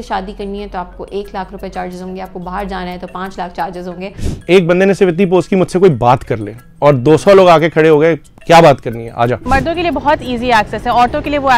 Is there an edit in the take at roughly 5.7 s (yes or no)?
no